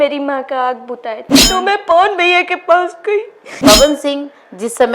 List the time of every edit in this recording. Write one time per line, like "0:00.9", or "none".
0:01.4
0:03.5